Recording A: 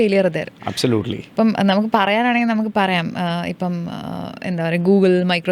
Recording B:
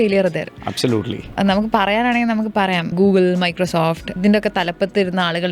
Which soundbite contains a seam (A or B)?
B